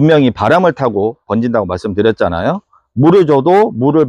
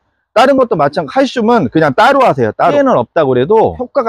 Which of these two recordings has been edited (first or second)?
second